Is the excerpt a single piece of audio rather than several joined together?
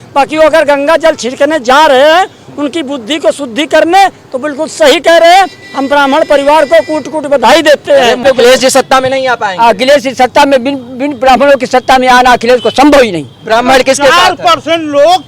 no; 1 cut; at 8.2 s

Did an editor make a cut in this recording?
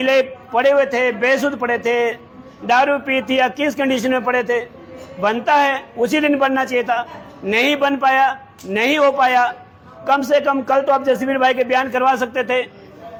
no; 0 cuts

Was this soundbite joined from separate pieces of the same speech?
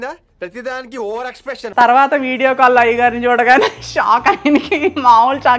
yes; 1 cut; at 1.7 s

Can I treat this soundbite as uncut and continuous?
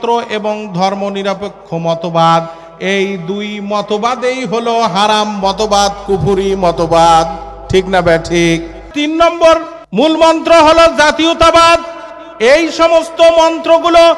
no; 2 cuts; at 8.9 s, 9.8 s

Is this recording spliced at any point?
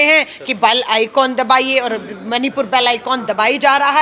no; 0 cuts

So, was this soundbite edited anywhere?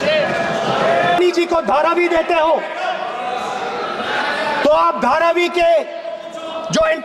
yes; 1 cut; at 1.2 s

